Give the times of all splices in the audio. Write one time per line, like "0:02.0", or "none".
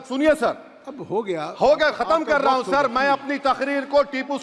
none